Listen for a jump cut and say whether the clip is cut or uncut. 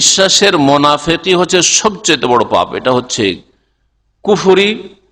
uncut